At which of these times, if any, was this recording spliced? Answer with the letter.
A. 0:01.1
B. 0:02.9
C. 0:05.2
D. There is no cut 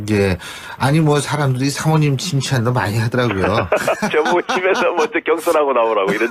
D